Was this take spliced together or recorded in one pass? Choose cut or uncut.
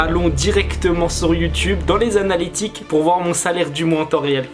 uncut